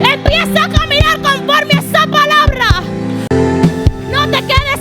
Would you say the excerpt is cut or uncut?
cut